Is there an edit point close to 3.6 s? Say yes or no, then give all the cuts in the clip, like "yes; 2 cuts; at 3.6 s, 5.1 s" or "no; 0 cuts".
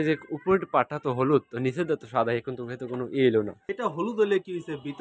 yes; 1 cut; at 3.6 s